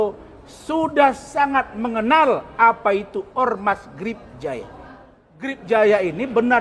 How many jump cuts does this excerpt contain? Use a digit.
1